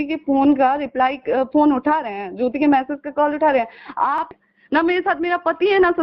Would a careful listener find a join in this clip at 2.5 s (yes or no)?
no